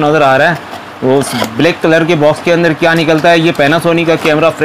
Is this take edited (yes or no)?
no